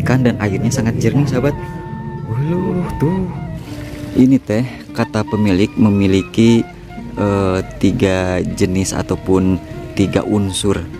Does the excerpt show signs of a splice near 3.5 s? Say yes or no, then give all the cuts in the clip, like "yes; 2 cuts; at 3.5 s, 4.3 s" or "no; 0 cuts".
yes; 1 cut; at 3.5 s